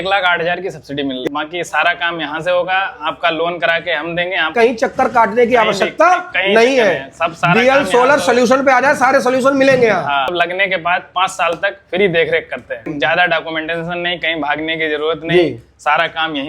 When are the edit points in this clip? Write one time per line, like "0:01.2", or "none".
0:01.2
0:04.5
0:10.3
0:12.9